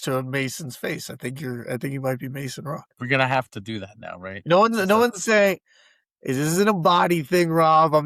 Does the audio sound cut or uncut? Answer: uncut